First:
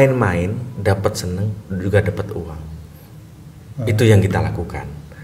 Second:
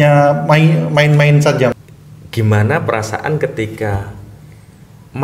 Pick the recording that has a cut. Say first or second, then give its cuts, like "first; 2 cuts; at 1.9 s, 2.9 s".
second; 1 cut; at 1.7 s